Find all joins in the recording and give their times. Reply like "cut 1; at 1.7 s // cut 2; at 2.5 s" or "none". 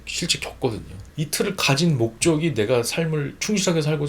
cut 1; at 1.0 s